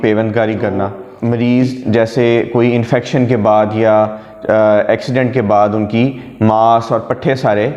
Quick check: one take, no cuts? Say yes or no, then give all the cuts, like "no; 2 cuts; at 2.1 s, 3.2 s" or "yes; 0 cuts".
no; 1 cut; at 1.1 s